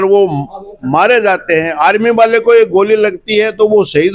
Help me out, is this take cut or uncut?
uncut